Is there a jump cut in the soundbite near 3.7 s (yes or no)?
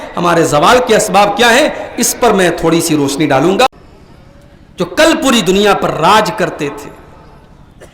yes